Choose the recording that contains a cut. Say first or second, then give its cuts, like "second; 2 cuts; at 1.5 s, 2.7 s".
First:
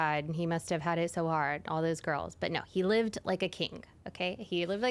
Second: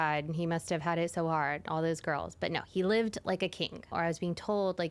second; 1 cut; at 3.9 s